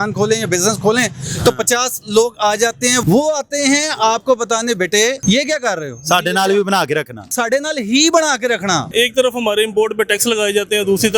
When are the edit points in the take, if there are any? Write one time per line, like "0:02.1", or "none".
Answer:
0:03.0
0:05.2
0:07.3
0:08.9